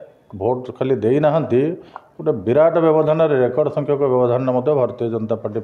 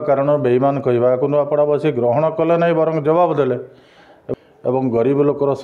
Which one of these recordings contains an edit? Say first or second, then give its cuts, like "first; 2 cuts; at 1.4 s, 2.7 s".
second; 1 cut; at 4.2 s